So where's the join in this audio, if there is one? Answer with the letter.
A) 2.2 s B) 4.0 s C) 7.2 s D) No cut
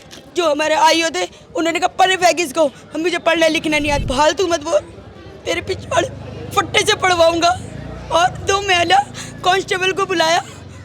B